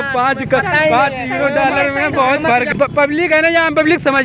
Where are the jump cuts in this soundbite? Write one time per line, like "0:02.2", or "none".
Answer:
0:02.7

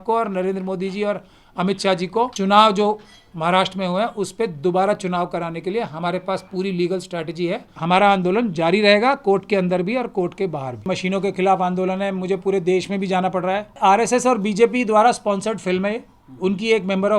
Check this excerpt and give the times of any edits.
0:02.3
0:07.7
0:10.9
0:13.8

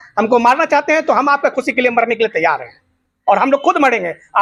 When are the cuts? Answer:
none

